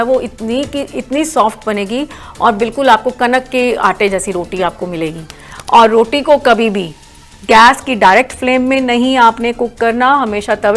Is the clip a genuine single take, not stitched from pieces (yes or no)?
no